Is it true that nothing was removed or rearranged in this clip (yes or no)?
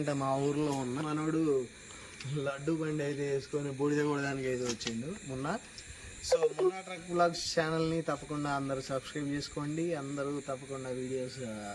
no